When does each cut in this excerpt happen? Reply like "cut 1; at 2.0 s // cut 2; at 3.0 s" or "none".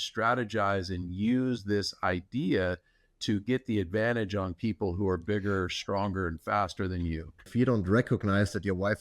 cut 1; at 7.5 s